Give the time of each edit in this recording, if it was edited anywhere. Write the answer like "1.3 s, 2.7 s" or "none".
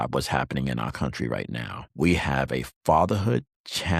1.8 s